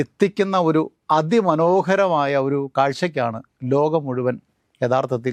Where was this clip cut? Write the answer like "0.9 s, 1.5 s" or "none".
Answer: none